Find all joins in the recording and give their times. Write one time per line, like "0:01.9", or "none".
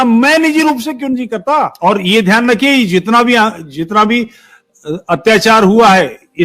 0:01.7